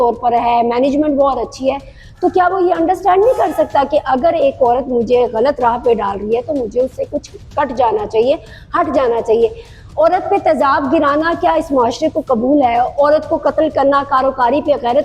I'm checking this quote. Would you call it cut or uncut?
uncut